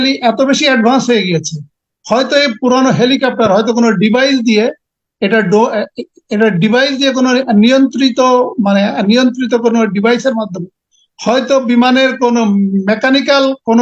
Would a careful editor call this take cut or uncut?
uncut